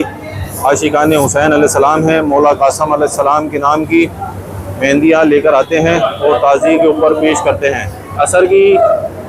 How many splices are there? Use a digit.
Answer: 1